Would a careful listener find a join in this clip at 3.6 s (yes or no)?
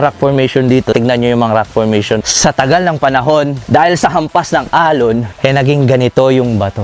yes